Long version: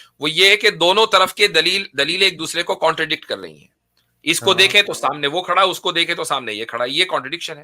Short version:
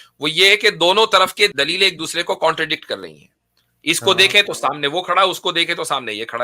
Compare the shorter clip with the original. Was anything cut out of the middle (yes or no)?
yes